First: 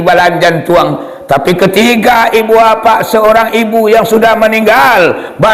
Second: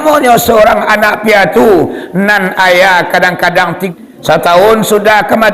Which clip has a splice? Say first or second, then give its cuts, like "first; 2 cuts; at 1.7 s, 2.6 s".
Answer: second; 1 cut; at 3.8 s